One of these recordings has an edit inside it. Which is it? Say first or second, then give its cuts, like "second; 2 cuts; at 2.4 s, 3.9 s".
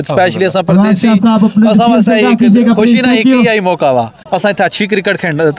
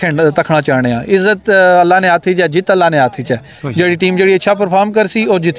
first; 1 cut; at 4.2 s